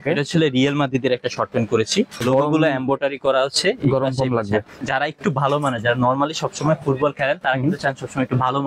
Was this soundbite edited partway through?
yes; 2 cuts; at 2.2 s, 4.8 s

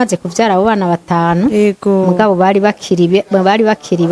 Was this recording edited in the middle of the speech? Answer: no; 0 cuts

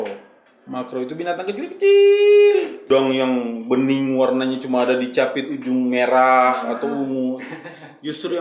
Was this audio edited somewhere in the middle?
yes; 1 cut; at 2.9 s

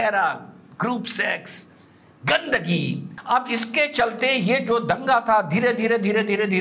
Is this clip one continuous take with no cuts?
no; 1 cut; at 3.1 s

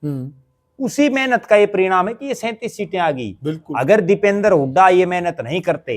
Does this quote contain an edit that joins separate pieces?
no; 0 cuts

